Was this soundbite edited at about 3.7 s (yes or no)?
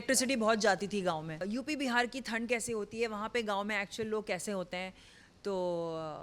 no